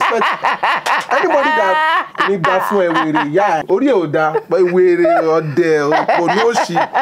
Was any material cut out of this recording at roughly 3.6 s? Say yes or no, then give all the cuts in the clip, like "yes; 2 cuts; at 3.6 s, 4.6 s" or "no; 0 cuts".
yes; 1 cut; at 3.6 s